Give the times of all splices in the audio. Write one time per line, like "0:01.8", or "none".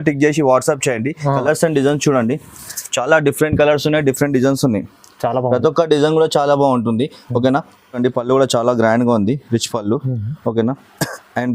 0:01.3
0:08.0